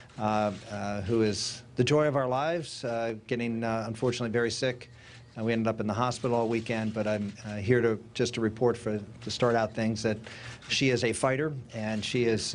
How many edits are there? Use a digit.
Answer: 0